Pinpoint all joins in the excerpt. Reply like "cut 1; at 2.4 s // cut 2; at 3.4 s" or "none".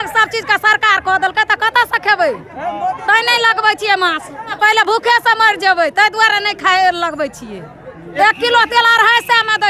cut 1; at 4.5 s // cut 2; at 8.1 s